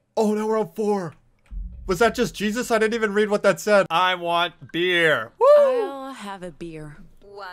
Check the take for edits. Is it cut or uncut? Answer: cut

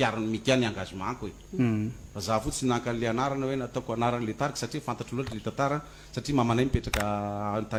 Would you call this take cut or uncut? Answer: uncut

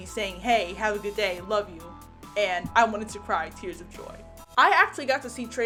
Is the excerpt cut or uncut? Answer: uncut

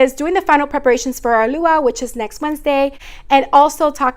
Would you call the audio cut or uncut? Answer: cut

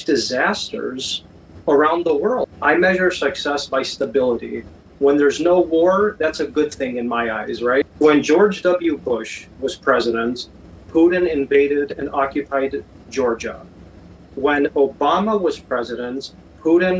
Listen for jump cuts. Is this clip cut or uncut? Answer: cut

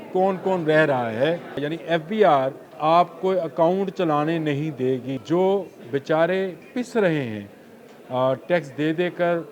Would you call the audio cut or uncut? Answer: cut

